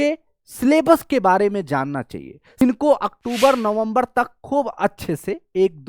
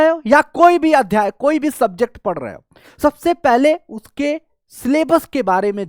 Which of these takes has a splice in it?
first; 1 cut; at 2.6 s

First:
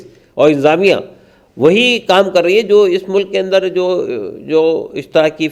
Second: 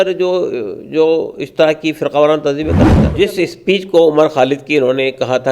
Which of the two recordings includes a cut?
second; 1 cut; at 3.0 s

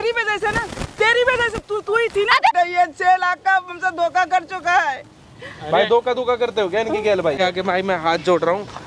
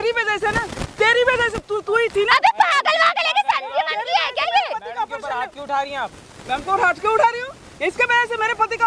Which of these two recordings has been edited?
first; 2 cuts; at 2.5 s, 7.4 s

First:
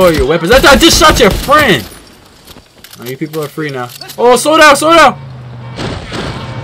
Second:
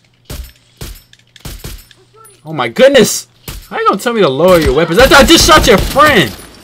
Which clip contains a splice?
second; 1 cut; at 2.9 s

